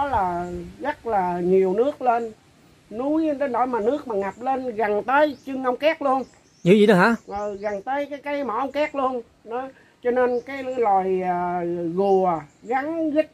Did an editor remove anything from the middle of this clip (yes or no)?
no